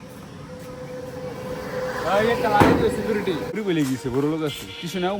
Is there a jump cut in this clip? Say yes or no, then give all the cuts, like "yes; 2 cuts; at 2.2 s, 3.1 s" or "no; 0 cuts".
yes; 1 cut; at 3.6 s